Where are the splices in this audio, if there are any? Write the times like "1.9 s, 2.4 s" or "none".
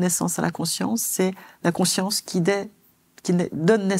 none